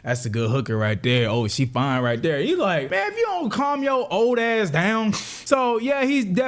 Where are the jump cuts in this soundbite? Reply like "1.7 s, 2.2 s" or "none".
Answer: 2.9 s, 5.3 s